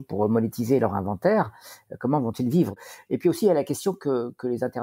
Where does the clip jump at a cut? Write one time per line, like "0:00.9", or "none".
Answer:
0:02.8

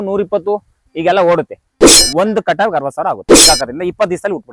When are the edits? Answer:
0:01.7
0:03.2

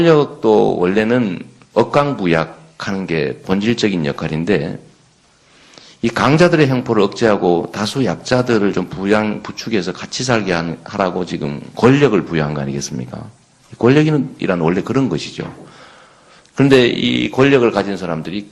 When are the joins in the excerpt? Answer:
0:11.6

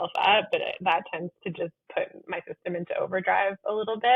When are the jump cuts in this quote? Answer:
none

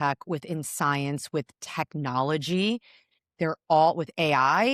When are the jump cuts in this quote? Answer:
none

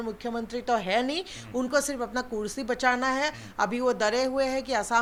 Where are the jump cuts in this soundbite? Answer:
none

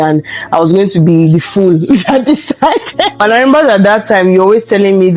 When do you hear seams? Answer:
0:03.2

